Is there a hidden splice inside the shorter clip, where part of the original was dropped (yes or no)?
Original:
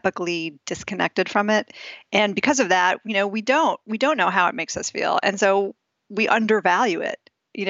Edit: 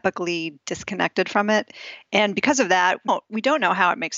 yes